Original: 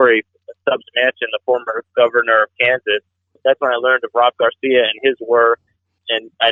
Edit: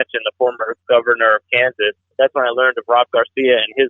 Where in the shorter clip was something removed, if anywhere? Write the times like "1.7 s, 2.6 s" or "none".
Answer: 2.0 s

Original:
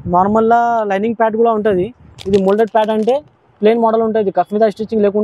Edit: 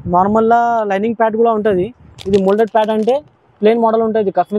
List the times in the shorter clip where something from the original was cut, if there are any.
none

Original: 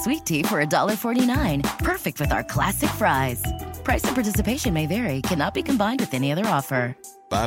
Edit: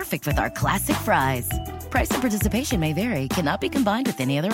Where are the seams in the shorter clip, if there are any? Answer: none

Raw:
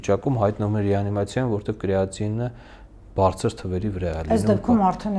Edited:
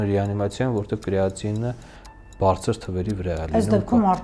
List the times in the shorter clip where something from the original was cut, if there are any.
none

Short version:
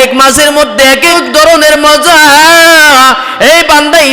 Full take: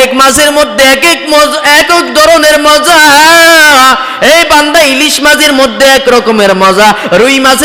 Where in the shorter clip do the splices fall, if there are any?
1.1 s

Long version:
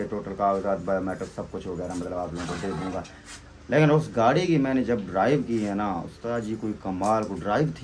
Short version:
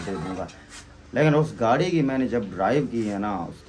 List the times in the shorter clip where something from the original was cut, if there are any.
none

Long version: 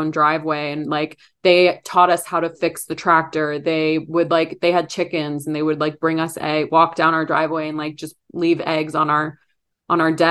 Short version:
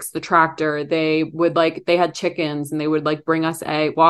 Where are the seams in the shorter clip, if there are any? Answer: none

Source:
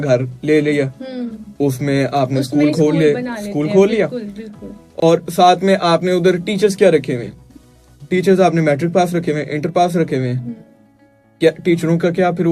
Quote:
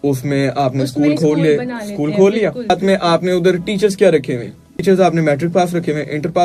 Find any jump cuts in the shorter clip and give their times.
2.7 s, 4.7 s

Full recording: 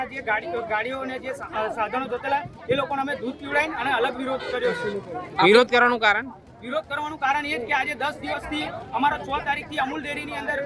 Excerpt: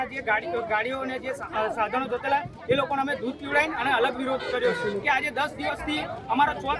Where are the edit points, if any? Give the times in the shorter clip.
5.0 s

